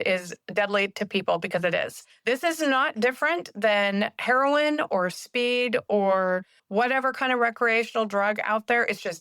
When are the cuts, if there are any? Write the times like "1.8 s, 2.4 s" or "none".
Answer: 2.0 s, 6.6 s